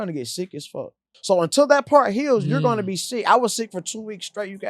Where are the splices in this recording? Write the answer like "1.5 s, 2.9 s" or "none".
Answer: 1.1 s